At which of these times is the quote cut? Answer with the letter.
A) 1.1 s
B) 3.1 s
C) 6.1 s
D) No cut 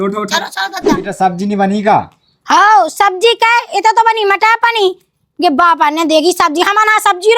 A